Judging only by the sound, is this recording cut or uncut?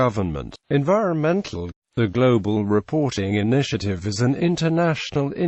uncut